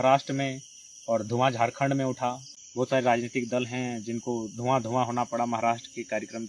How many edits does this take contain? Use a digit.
1